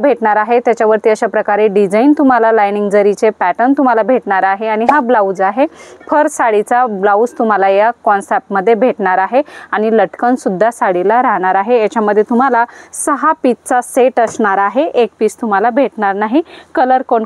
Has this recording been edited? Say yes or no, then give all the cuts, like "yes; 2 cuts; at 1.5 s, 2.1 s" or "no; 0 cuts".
no; 0 cuts